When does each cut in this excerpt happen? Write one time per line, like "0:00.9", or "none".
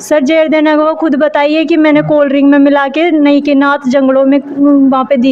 none